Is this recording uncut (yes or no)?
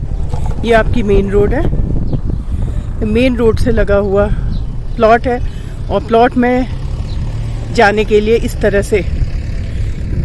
yes